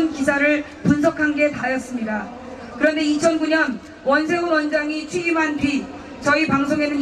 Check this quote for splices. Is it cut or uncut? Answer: cut